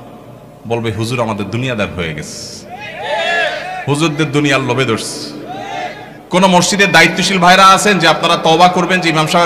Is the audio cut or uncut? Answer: cut